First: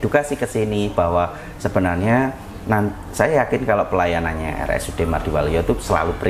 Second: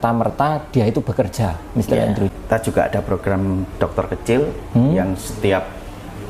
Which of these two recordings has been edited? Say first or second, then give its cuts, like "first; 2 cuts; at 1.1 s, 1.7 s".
second; 1 cut; at 2.3 s